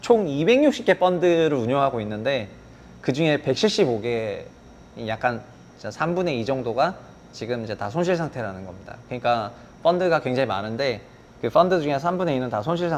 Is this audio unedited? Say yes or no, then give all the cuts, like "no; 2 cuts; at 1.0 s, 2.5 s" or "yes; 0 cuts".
yes; 0 cuts